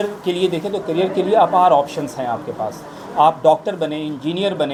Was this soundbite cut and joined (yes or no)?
no